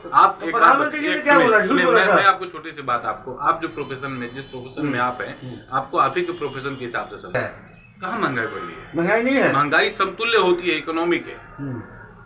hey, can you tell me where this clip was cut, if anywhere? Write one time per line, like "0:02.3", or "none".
0:07.4